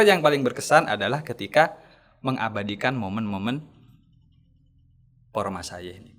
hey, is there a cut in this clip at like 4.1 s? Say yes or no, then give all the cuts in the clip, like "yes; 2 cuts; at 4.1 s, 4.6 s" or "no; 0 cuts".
no; 0 cuts